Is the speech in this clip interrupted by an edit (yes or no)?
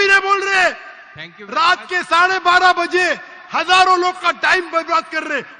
no